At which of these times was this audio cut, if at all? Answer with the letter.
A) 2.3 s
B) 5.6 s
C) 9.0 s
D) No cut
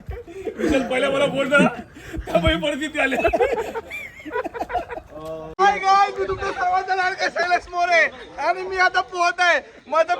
B